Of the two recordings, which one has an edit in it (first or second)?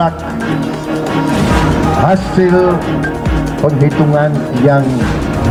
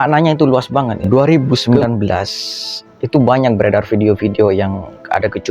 second